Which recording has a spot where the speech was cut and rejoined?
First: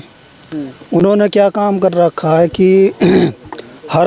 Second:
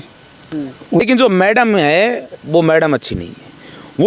second; 1 cut; at 1.0 s

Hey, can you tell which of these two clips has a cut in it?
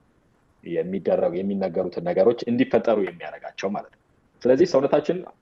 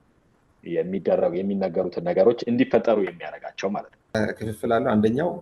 second; 1 cut; at 4.1 s

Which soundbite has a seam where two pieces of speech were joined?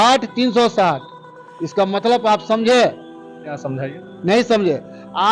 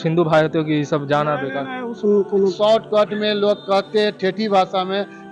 second; 1 cut; at 2.5 s

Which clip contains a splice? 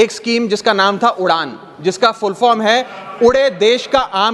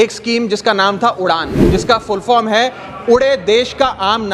second; 1 cut; at 1.5 s

